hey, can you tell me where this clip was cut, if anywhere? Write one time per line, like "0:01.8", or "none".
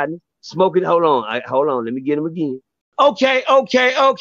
0:02.9